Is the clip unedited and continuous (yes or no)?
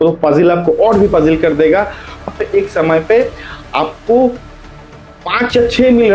no